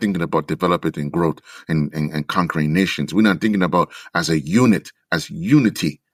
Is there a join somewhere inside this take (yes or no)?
no